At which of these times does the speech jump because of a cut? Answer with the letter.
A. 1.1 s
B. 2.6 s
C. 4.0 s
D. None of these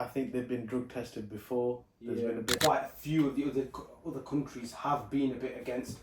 B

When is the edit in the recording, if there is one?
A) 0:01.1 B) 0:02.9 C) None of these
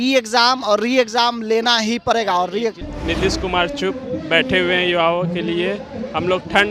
B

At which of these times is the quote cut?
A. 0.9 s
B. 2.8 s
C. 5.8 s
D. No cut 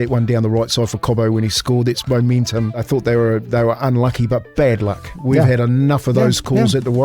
B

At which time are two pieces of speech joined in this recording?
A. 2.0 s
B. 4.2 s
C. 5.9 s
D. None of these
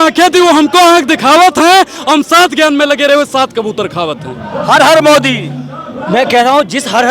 D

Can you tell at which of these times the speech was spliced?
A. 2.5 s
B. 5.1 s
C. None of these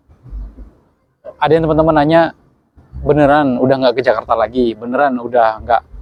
C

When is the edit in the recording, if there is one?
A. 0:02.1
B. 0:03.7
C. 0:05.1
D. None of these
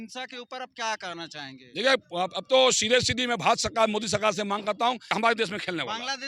C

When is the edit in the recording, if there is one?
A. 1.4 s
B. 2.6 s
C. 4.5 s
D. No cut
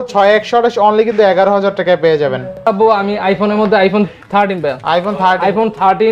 B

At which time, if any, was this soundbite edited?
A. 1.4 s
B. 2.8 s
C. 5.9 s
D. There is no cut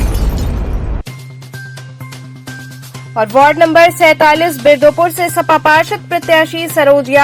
B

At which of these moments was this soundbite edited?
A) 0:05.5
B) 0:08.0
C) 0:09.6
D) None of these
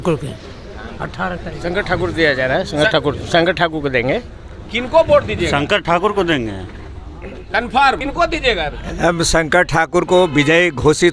B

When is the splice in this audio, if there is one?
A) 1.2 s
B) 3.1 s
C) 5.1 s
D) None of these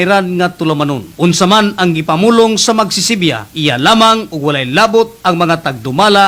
D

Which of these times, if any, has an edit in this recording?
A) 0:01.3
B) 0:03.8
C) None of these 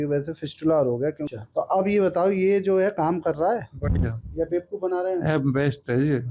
A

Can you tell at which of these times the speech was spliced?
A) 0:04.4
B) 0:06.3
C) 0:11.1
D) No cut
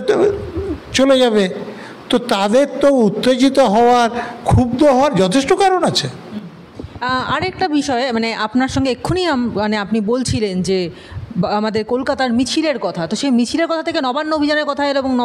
D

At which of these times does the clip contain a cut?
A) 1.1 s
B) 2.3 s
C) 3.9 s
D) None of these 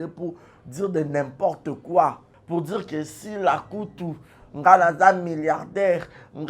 B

